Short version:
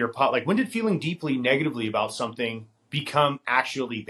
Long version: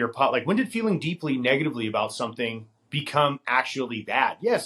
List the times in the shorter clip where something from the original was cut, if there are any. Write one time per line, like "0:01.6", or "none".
none